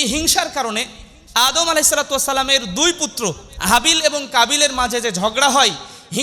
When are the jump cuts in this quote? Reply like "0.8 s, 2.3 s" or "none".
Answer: none